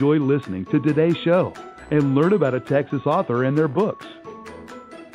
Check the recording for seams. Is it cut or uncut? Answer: cut